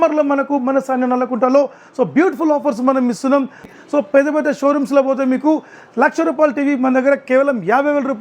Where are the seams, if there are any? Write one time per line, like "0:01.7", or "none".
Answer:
0:03.7